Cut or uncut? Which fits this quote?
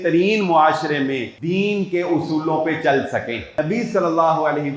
cut